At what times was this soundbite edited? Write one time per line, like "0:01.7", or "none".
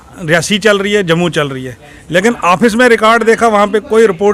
none